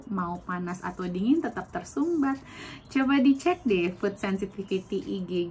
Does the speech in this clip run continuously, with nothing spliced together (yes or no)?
yes